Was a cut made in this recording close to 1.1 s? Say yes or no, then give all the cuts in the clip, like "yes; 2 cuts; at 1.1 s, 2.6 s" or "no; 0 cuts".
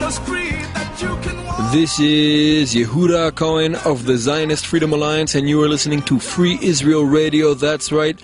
no; 0 cuts